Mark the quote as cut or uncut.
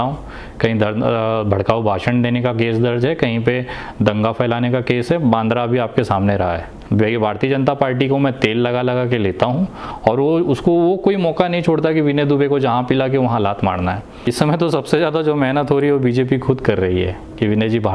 cut